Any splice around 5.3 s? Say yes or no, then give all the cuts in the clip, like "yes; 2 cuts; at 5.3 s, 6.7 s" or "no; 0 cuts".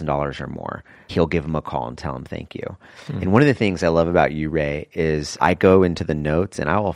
yes; 2 cuts; at 1.1 s, 5.3 s